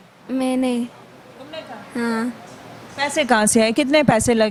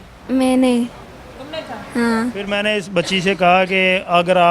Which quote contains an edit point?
second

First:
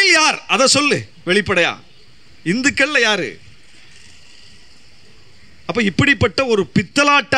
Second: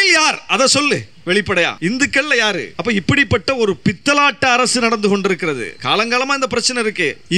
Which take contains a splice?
second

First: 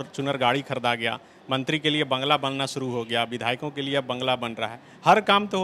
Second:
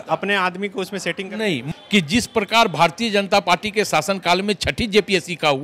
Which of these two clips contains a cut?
second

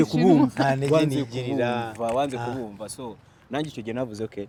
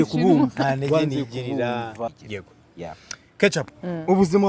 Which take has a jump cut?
second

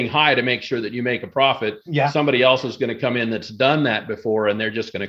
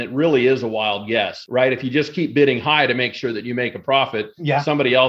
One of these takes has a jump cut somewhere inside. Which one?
second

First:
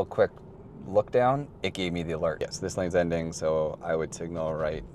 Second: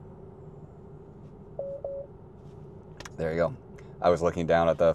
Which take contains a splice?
first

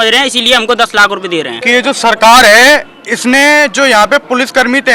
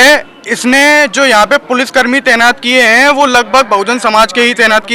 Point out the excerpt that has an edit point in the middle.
first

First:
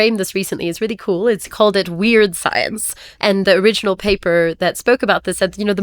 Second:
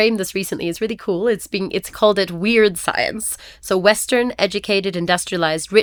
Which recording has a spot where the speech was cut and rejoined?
first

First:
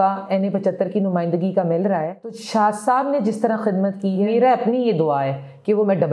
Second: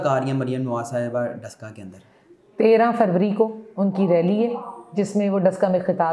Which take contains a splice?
first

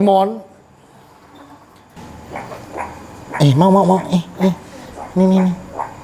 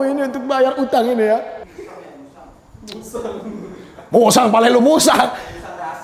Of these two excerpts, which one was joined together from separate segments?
first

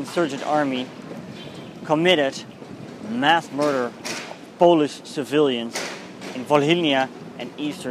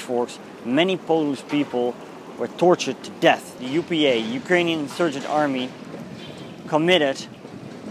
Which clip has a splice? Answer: second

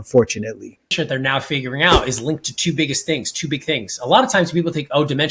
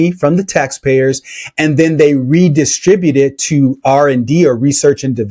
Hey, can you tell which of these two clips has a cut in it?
first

